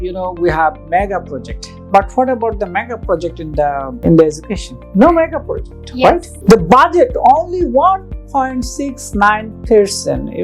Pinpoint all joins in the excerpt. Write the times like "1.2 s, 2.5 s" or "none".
4.0 s, 6.3 s